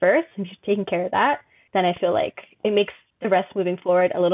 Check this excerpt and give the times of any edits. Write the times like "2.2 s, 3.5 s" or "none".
1.5 s, 3.1 s